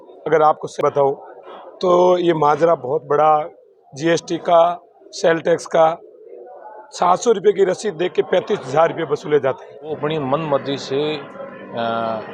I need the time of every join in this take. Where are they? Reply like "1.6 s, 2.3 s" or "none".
0.8 s, 10.0 s